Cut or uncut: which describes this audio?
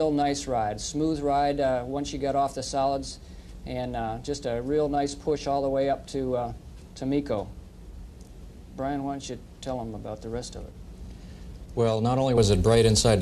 cut